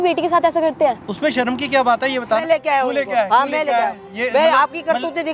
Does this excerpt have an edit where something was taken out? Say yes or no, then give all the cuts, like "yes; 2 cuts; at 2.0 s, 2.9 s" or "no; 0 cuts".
yes; 1 cut; at 2.4 s